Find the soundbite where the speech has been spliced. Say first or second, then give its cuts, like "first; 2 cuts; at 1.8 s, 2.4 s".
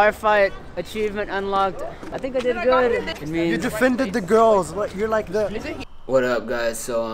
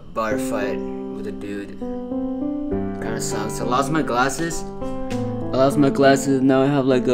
first; 2 cuts; at 2.0 s, 5.8 s